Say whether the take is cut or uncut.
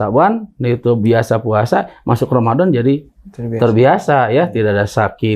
uncut